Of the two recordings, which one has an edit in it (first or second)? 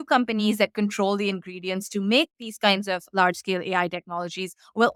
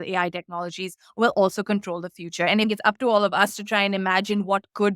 second